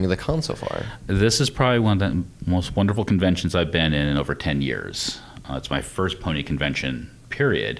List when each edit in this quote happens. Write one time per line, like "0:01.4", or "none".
0:03.9